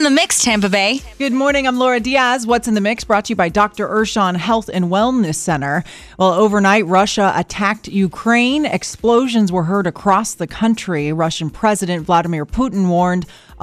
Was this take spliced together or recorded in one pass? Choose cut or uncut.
cut